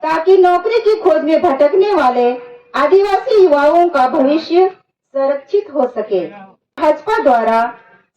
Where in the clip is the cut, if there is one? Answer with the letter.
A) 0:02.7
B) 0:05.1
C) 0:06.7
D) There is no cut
C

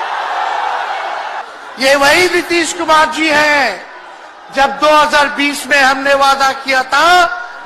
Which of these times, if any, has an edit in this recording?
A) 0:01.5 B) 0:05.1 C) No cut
A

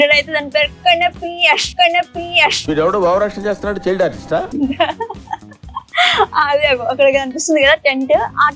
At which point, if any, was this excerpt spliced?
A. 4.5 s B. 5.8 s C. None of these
C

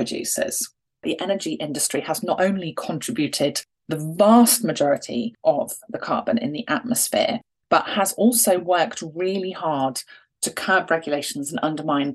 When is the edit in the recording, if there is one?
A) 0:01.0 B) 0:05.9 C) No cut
A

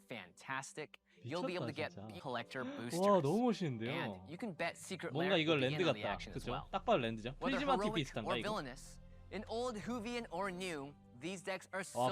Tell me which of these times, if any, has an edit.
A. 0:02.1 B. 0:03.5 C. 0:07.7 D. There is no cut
A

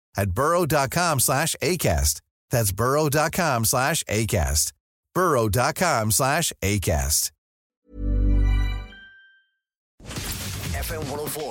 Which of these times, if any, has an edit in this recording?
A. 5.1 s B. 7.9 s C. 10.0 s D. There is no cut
C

